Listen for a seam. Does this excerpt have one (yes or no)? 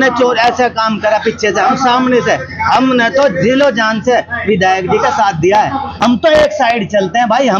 yes